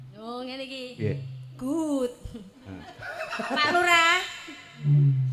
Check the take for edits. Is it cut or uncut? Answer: uncut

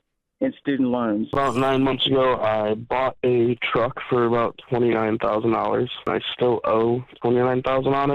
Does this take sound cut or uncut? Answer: cut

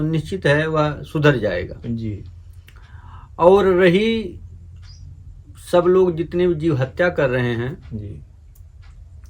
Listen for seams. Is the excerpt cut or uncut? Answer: uncut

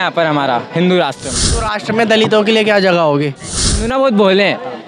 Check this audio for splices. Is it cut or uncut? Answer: cut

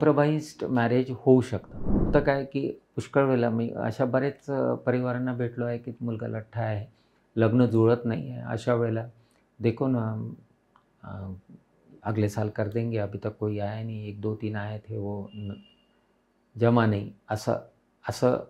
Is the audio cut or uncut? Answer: cut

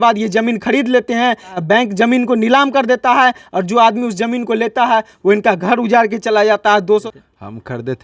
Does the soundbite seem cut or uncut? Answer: cut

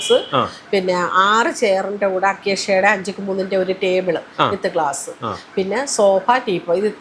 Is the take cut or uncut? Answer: uncut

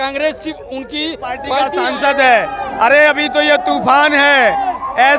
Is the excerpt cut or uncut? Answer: cut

